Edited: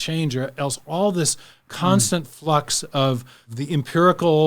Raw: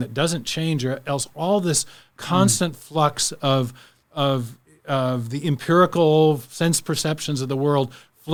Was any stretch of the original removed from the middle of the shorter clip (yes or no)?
yes